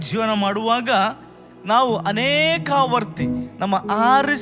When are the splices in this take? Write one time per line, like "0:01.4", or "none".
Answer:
0:03.5